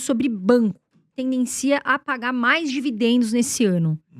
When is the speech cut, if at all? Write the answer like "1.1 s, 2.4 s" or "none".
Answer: 1.1 s